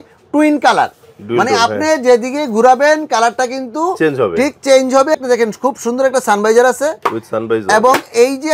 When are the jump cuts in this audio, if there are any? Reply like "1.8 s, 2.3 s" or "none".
5.1 s